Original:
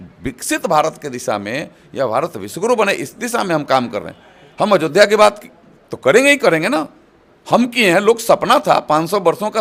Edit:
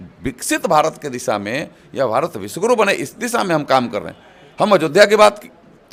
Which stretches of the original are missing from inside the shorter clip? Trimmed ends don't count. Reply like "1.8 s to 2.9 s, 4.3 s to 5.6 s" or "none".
none